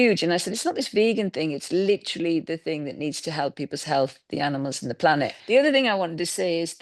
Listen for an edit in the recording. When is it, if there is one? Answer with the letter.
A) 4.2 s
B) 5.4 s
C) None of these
B